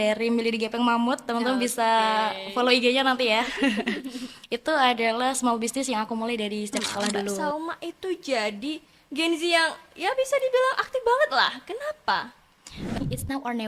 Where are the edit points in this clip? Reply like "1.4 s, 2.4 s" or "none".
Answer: 7.4 s, 13.0 s